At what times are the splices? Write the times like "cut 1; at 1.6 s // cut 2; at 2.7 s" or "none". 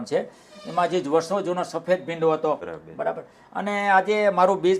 cut 1; at 2.7 s